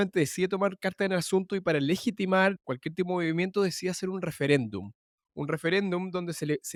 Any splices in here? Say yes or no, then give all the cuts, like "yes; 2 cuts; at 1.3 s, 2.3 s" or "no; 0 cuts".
no; 0 cuts